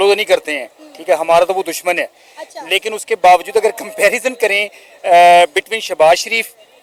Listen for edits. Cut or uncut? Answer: uncut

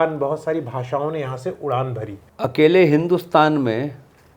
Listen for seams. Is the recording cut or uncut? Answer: cut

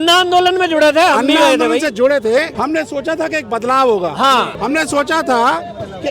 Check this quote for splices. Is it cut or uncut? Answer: cut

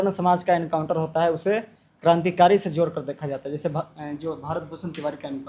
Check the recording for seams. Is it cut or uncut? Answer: uncut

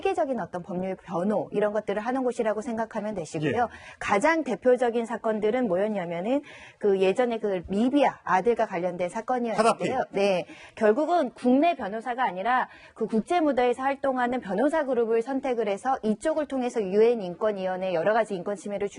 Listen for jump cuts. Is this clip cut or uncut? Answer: cut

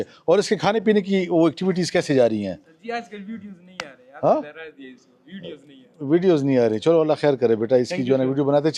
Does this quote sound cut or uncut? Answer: uncut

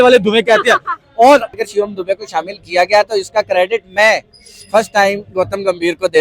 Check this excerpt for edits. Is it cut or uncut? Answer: cut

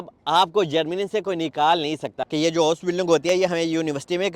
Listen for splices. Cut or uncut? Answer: cut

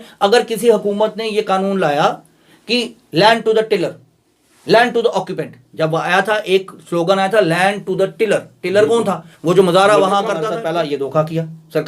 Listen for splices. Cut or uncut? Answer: cut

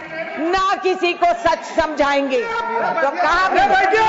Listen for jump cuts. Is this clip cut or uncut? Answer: cut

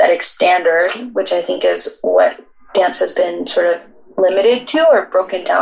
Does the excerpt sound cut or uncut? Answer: uncut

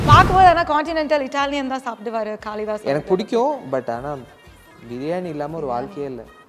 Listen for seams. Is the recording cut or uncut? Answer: uncut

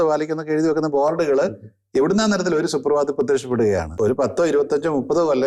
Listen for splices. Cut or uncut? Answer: cut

